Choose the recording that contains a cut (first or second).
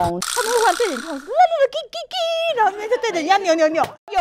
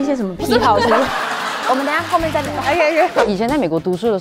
second